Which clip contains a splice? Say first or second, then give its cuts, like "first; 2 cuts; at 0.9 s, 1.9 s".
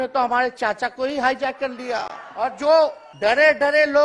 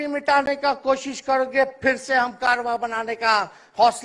first; 2 cuts; at 2.2 s, 3.0 s